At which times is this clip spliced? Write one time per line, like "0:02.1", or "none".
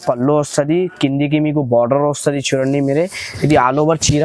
none